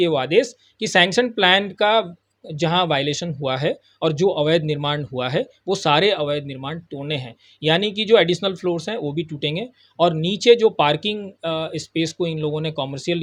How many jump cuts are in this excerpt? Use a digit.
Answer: 0